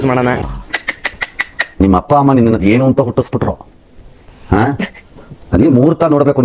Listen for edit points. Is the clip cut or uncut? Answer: uncut